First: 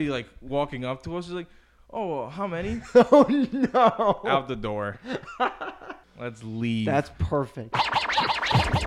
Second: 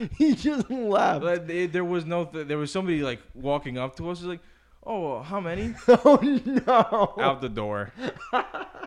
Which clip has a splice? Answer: first; 1 cut; at 7.7 s

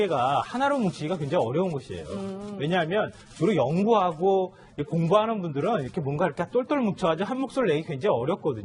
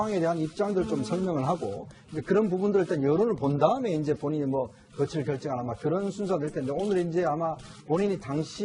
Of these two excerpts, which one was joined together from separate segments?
first; 1 cut; at 3.1 s

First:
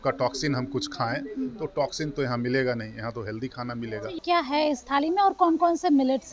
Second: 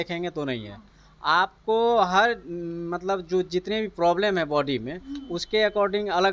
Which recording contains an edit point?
first; 1 cut; at 4.2 s

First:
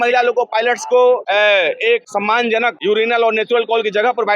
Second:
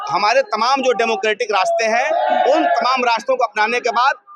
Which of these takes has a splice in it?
first; 2 cuts; at 1.2 s, 2.5 s

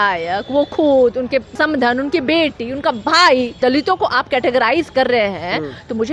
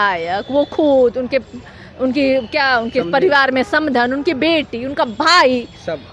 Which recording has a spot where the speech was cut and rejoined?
first; 2 cuts; at 1.5 s, 3.6 s

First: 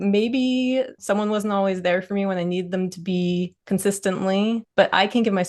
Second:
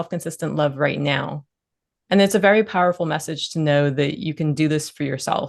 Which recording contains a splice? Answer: first; 3 cuts; at 1.0 s, 3.6 s, 4.7 s

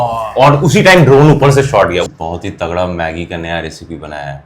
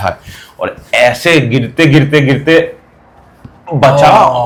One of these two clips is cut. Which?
first; 1 cut; at 2.0 s

